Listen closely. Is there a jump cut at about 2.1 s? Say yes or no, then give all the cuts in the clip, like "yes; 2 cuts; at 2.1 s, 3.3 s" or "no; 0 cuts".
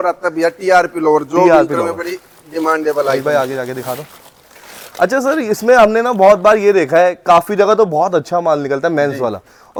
no; 0 cuts